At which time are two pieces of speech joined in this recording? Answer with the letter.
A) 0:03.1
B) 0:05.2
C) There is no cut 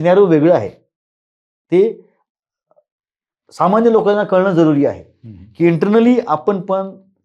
C